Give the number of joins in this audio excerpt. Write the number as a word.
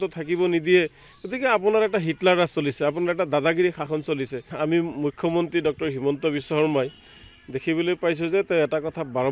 one